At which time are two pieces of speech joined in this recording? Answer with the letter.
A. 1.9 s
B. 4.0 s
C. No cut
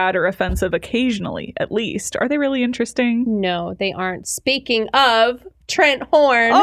C